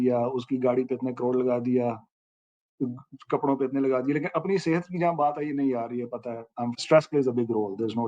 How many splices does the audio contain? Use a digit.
1